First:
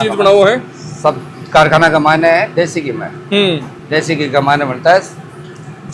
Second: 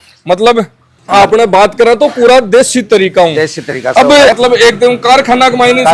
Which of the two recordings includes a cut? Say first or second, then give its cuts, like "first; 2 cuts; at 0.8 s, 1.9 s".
second; 1 cut; at 4.3 s